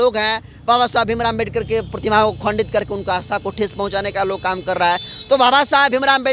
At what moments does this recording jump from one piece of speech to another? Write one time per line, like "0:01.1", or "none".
none